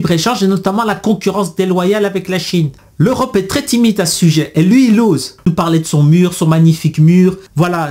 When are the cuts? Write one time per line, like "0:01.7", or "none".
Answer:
0:05.5